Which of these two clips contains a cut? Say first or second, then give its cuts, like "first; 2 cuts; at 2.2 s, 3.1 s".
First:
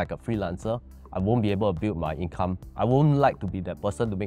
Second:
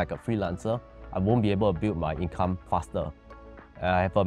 first; 1 cut; at 2.6 s